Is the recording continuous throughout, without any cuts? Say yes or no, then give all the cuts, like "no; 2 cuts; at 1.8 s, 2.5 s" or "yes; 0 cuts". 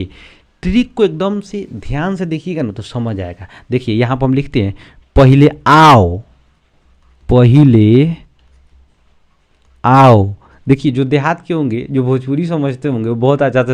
yes; 0 cuts